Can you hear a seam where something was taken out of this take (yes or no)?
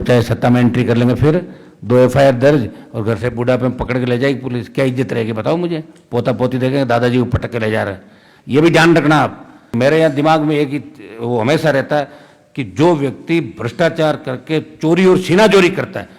yes